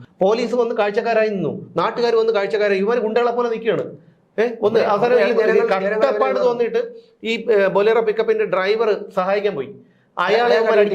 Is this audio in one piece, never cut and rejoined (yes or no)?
yes